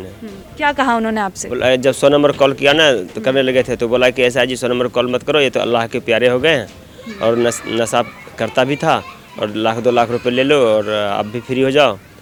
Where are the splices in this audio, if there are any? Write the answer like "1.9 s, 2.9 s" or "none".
none

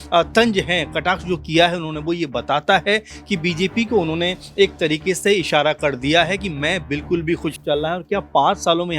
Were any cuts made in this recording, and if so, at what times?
7.6 s

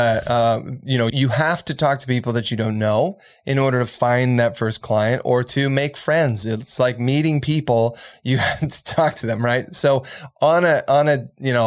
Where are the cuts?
1.1 s

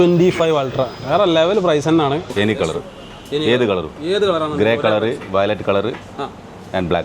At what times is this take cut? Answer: 2.3 s

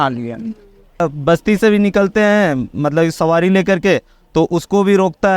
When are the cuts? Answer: 1.0 s

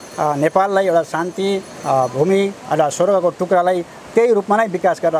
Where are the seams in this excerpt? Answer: none

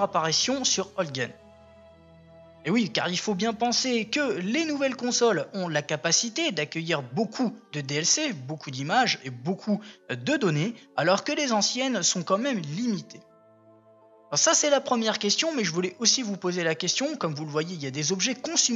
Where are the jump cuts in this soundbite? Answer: 12.6 s

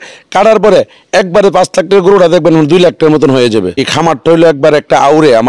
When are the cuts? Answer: 3.7 s

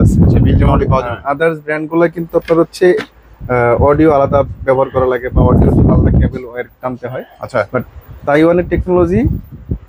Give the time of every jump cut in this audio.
none

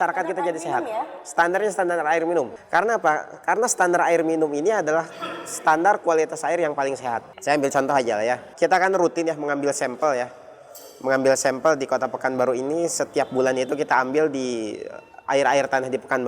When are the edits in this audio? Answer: 2.6 s, 7.3 s, 8.5 s

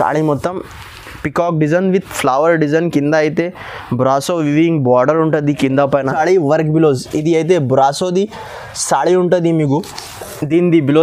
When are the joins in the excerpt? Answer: 6.1 s

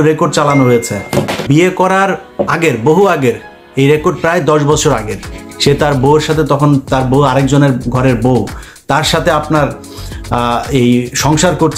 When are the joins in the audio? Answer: 1.4 s

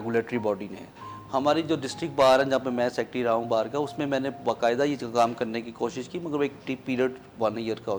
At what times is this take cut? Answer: none

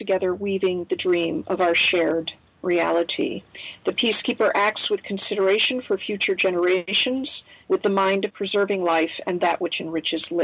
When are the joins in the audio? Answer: 7.2 s, 8.3 s

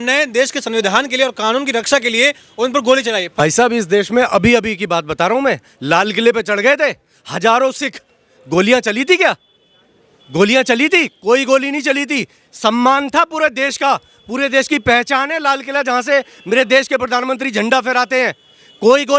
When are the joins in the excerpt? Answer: 3.4 s

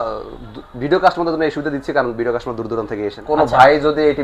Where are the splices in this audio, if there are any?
3.2 s

